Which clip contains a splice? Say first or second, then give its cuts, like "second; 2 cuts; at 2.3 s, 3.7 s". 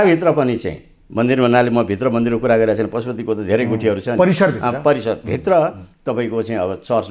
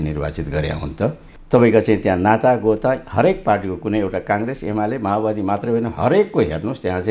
second; 1 cut; at 1.3 s